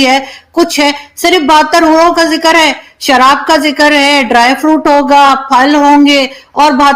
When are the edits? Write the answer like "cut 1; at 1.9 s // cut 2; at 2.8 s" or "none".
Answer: none